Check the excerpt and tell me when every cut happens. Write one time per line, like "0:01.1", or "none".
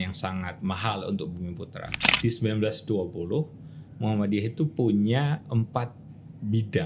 0:02.0